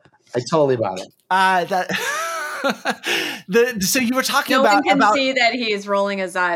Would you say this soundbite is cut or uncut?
cut